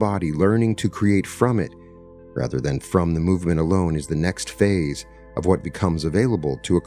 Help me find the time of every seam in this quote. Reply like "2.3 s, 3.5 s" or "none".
none